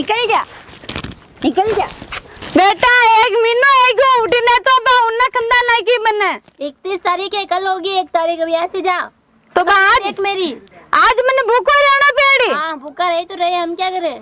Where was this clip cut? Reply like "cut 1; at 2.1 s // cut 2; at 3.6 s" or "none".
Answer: cut 1; at 2.3 s